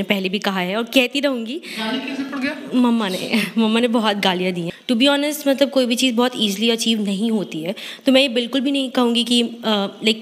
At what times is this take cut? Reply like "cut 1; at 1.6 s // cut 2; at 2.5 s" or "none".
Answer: cut 1; at 4.6 s